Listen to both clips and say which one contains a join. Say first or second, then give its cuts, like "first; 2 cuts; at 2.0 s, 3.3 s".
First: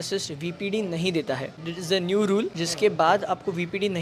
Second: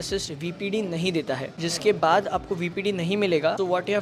second; 1 cut; at 1.6 s